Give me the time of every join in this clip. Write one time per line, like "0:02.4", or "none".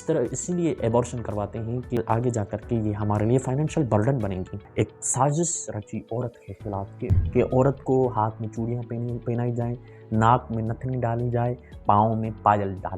0:02.0
0:04.6
0:07.2